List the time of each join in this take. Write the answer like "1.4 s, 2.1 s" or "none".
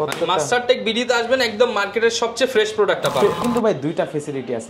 3.4 s

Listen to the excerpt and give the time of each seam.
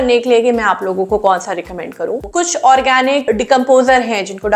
2.2 s

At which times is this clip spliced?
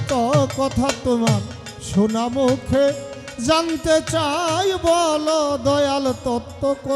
none

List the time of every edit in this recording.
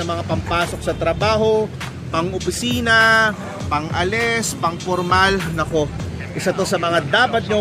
none

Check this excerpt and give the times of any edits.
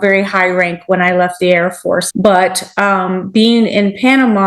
2.1 s

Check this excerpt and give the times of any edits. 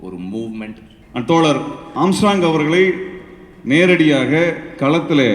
0.9 s

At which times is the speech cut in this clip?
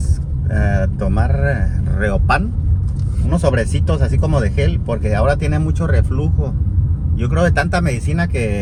none

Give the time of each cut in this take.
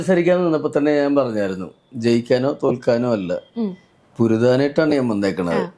none

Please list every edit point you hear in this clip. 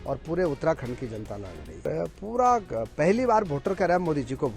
1.8 s

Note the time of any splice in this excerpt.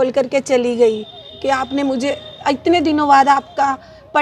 none

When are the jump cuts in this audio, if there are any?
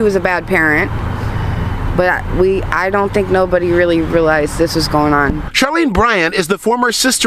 none

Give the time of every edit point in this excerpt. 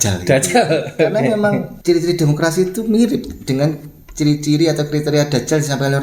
1.7 s

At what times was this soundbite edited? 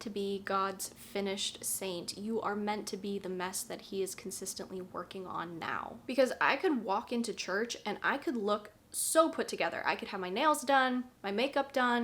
6.0 s

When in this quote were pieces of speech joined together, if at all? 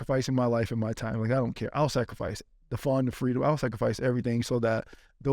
none

